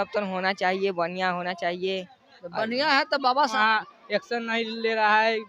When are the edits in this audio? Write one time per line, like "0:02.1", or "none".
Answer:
0:03.5

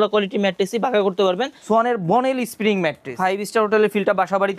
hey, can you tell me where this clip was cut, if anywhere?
0:01.5
0:03.2

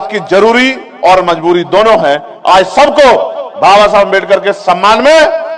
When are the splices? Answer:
none

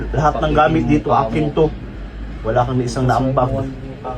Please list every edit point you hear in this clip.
none

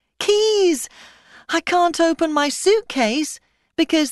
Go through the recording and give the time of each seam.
0:02.1

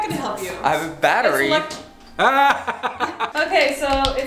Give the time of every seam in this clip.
0:03.3

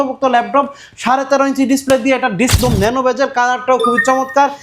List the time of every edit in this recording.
0:02.6

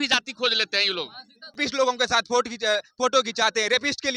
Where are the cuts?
0:01.6

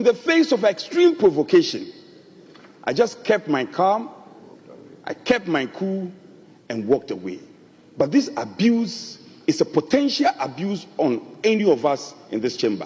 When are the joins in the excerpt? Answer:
none

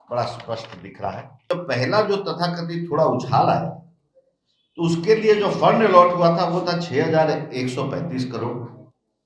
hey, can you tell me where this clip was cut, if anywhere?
0:01.6

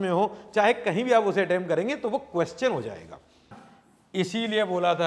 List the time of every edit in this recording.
0:03.5

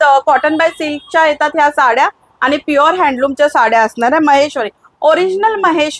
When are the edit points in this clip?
none

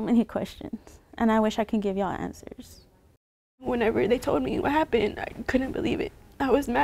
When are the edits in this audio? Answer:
0:03.6

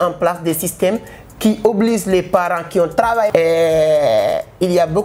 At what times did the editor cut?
0:03.3

